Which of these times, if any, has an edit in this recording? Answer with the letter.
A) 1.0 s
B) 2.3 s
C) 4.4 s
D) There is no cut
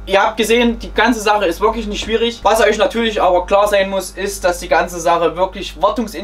B